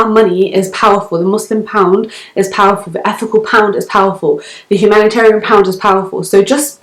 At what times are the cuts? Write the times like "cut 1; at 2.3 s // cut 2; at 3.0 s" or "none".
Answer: none